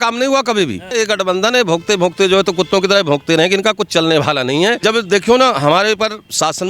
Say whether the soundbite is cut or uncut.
cut